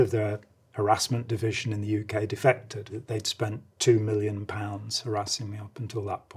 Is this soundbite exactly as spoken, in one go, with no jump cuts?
no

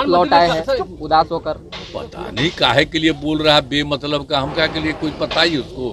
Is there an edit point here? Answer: no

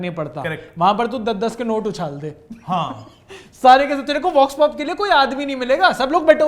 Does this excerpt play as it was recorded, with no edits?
yes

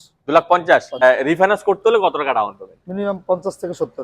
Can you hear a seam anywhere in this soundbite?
yes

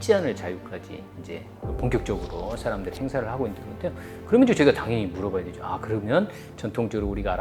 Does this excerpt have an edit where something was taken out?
no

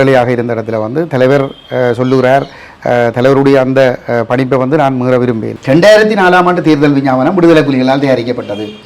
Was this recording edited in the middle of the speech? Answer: yes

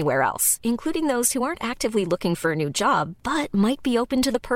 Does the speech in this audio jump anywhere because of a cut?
no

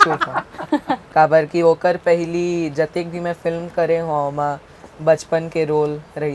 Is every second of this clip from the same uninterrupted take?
no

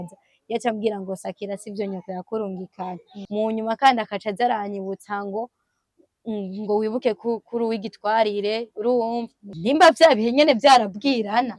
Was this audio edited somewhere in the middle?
yes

